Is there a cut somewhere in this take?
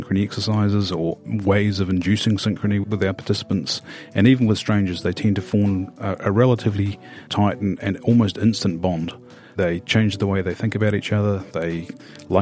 no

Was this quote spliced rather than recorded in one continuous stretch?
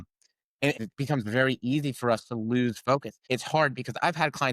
yes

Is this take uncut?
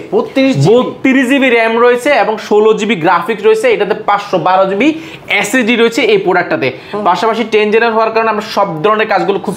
yes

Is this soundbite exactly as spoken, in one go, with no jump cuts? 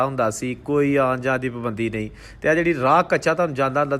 yes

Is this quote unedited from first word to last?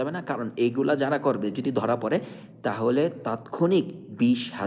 no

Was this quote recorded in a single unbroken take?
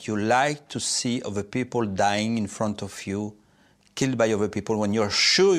yes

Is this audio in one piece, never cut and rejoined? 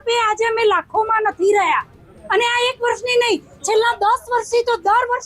yes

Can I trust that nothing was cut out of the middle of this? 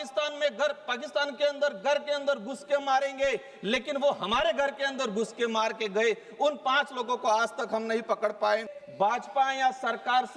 no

